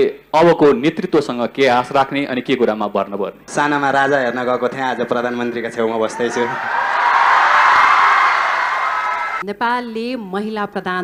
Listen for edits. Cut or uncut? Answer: cut